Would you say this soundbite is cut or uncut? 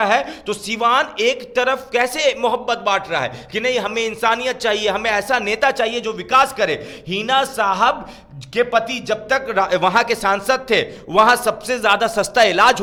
uncut